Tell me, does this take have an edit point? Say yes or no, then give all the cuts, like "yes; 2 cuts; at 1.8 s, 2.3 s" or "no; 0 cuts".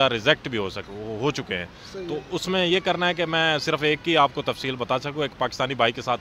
no; 0 cuts